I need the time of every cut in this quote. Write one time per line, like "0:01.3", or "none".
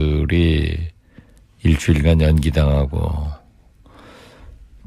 0:03.0